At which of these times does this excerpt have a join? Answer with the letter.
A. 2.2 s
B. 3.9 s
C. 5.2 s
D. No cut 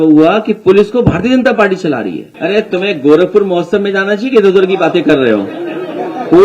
A